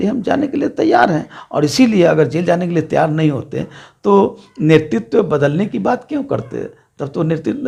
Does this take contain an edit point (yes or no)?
no